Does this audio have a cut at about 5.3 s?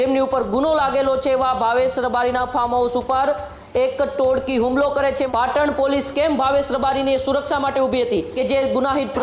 yes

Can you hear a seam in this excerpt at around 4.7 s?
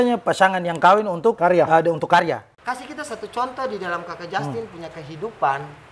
no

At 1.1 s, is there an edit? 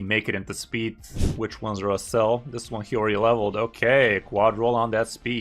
yes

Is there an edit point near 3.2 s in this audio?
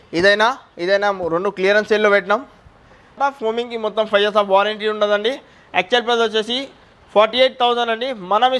yes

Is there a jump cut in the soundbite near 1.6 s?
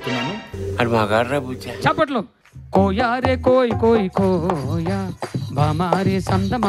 yes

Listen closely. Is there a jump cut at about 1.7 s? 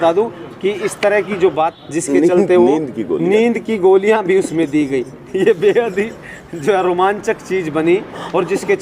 yes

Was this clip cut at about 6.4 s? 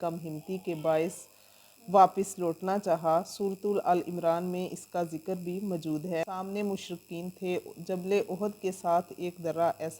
yes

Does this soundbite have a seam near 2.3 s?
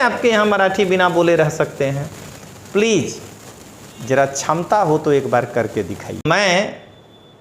no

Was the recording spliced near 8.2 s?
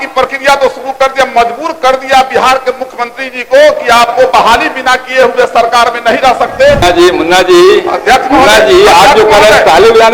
no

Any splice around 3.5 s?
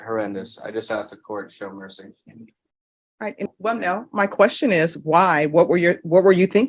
yes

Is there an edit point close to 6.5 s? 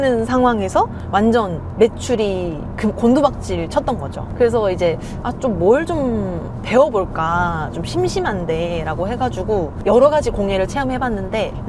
no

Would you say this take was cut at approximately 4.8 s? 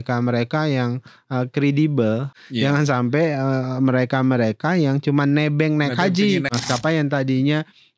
no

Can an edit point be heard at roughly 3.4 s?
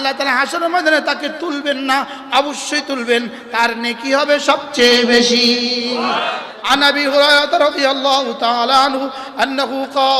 no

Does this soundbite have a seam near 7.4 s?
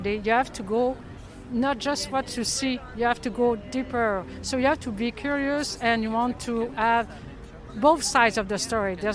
no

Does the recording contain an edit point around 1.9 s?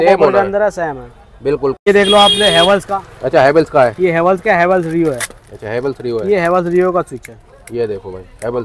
yes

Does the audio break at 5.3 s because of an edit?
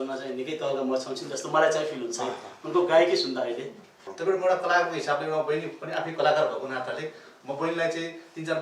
no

